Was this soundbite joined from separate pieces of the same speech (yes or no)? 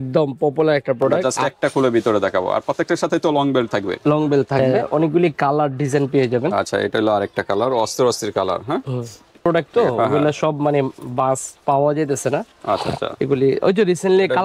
yes